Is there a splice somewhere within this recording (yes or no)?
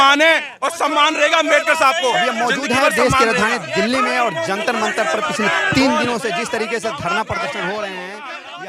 no